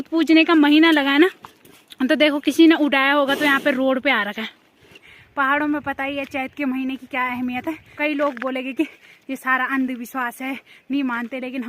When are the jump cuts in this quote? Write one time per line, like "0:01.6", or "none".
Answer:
0:05.1
0:07.9